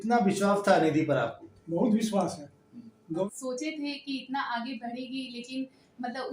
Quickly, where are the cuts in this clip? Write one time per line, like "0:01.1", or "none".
0:03.2